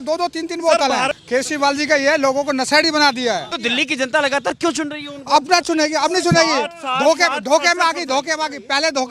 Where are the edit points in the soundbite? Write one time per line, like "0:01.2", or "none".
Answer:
0:01.1
0:03.5